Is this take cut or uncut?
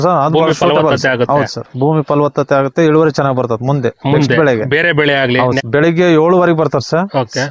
cut